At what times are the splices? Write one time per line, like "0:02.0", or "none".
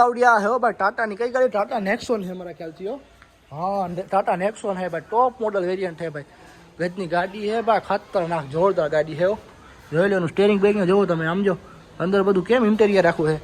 none